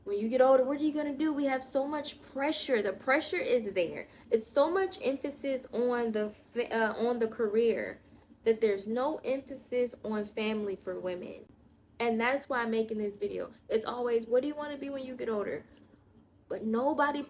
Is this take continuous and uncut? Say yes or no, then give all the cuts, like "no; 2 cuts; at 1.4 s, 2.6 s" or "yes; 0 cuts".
yes; 0 cuts